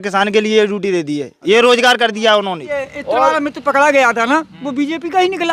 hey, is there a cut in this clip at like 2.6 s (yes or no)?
yes